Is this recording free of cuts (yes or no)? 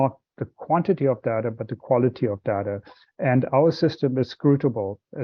yes